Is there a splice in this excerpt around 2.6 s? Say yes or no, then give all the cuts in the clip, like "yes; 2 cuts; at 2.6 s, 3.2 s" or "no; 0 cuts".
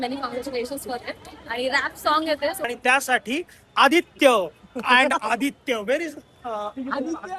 yes; 1 cut; at 2.6 s